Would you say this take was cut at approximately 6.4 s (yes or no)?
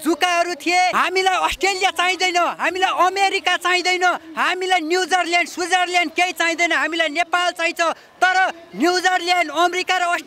no